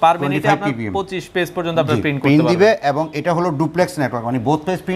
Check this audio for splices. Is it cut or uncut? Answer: uncut